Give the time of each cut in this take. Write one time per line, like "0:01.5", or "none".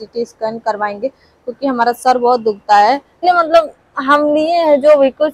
0:03.2